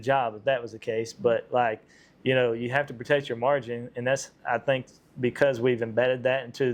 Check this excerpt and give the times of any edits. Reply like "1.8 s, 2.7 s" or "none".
none